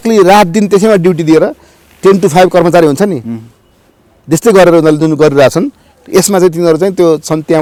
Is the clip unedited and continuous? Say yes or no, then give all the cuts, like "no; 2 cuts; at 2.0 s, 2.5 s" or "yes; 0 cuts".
yes; 0 cuts